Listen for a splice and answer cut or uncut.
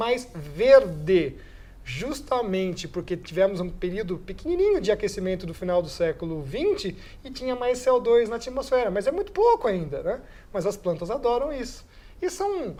uncut